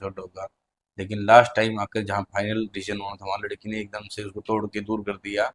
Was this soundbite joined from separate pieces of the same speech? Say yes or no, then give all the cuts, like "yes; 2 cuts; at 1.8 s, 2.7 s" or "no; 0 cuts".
no; 0 cuts